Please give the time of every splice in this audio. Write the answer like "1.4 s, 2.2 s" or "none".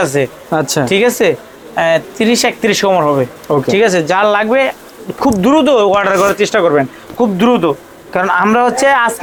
none

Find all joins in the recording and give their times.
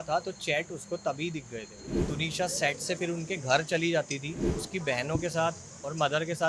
1.9 s, 4.5 s

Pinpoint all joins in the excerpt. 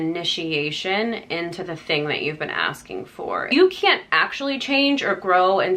3.5 s

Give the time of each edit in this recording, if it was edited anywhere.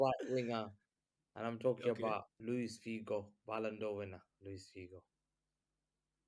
2.3 s

